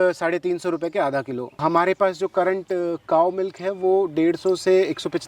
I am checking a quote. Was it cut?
yes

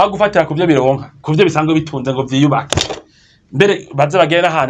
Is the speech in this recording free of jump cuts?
no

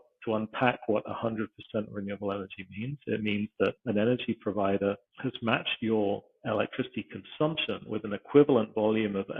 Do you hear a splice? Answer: yes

